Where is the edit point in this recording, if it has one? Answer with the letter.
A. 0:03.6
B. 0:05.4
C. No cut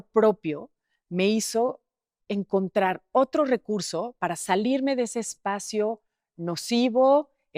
C